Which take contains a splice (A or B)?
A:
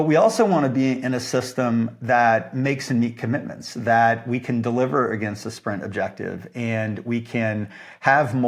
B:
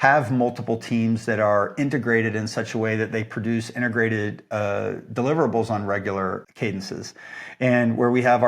B